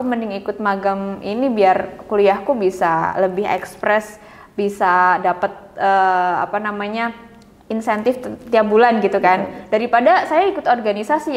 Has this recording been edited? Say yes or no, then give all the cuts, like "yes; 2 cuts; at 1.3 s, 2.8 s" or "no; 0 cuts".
no; 0 cuts